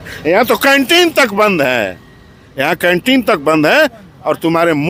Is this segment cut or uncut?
uncut